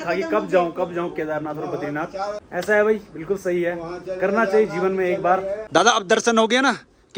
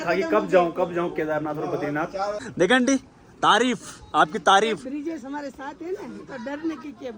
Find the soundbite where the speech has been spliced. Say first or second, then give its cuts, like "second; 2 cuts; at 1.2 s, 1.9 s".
second; 1 cut; at 2.4 s